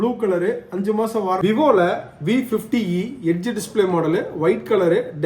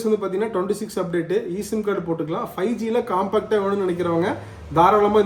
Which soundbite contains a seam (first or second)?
first